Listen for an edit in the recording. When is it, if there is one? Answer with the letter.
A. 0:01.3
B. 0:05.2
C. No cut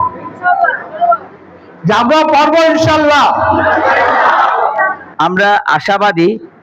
B